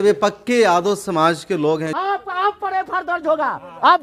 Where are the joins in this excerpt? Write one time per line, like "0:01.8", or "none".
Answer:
0:01.9